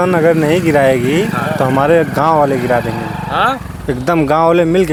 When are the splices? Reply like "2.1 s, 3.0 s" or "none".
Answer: none